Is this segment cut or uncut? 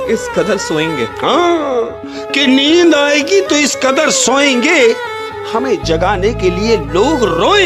uncut